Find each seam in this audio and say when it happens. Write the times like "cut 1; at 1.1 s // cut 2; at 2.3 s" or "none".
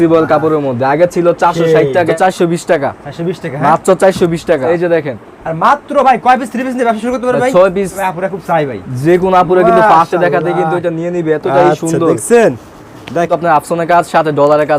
cut 1; at 2.1 s // cut 2; at 4.6 s // cut 3; at 8.0 s // cut 4; at 13.3 s